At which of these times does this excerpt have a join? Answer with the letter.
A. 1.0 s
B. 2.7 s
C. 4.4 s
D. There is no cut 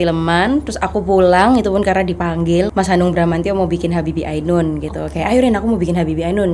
B